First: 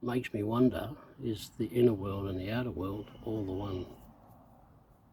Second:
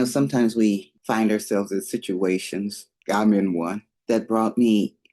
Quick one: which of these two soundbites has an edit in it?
second; 3 cuts; at 0.9 s, 2.9 s, 3.9 s

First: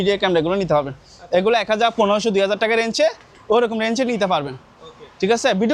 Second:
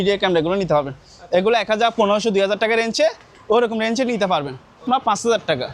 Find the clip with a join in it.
second; 1 cut; at 4.9 s

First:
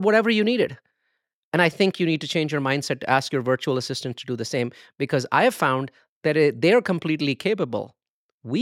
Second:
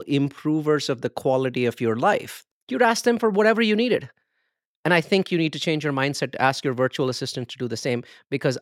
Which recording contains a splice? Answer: second; 1 cut; at 2.3 s

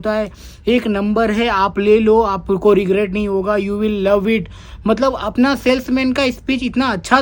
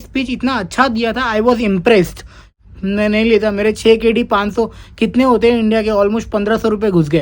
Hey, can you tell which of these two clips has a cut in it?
second; 1 cut; at 2.4 s

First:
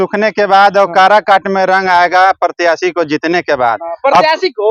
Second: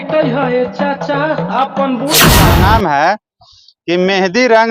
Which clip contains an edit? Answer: second; 1 cut; at 2.4 s

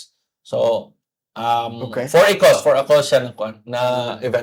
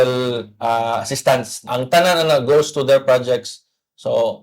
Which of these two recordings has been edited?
second; 1 cut; at 1.6 s

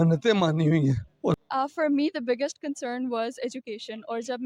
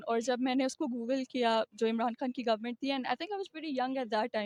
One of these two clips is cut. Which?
first; 1 cut; at 1.3 s

